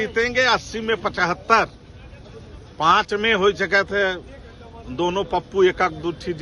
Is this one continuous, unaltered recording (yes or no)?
yes